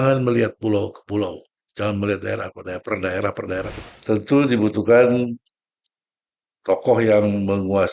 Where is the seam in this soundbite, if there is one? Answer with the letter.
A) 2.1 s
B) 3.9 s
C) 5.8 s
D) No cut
B